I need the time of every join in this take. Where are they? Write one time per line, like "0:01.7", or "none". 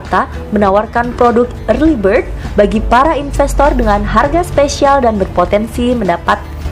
none